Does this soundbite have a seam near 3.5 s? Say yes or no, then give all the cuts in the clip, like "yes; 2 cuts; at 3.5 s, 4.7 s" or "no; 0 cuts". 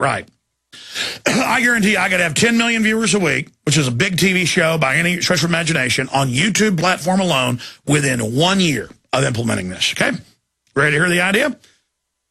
no; 1 cut; at 8.9 s